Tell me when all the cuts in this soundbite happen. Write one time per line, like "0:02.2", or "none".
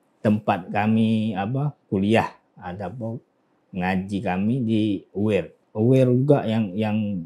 0:05.6